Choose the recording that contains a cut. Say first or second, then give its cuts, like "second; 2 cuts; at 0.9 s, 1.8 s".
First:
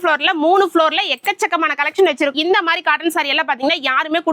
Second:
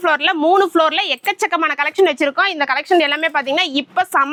first; 1 cut; at 2.3 s